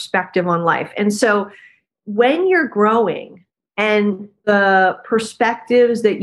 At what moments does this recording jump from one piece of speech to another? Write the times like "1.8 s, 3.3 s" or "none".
4.4 s